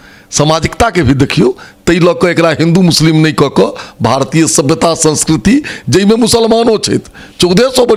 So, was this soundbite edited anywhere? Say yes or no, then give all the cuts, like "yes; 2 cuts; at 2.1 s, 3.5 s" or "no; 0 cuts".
no; 0 cuts